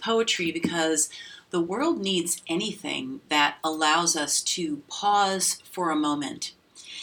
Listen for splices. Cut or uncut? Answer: uncut